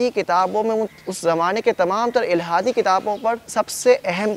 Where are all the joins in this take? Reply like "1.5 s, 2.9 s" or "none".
3.4 s